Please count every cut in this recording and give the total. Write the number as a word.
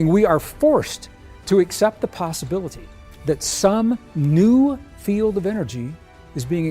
zero